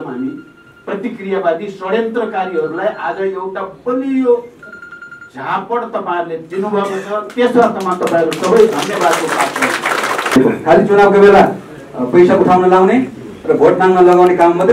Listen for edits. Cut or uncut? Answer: cut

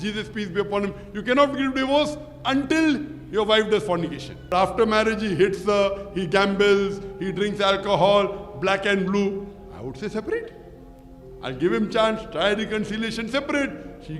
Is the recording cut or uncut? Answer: cut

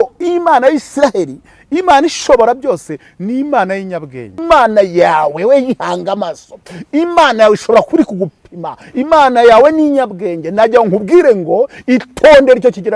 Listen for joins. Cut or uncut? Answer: cut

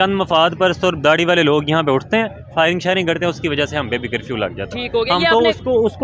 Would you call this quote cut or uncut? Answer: uncut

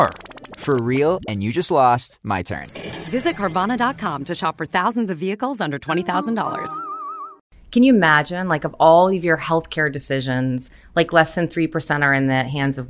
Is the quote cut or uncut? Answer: cut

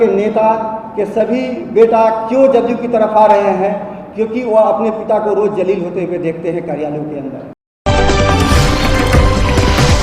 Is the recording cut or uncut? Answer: cut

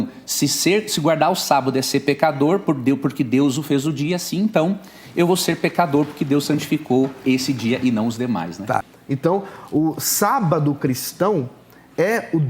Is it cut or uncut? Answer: cut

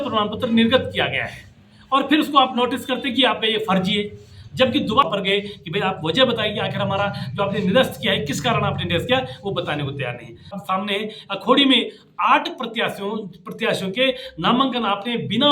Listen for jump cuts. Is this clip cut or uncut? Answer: cut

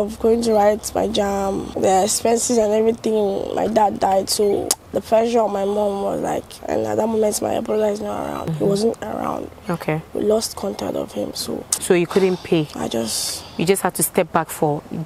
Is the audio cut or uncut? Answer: cut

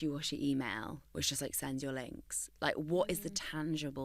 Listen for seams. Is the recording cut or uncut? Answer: uncut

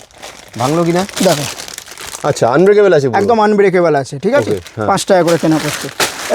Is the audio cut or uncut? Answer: uncut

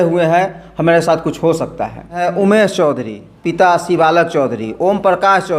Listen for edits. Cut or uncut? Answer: cut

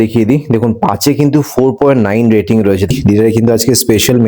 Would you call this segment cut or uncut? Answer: cut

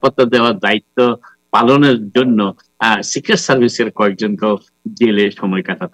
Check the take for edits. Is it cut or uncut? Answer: uncut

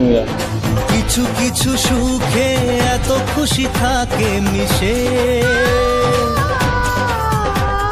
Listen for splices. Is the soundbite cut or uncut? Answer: uncut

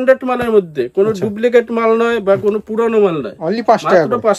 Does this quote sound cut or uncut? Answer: uncut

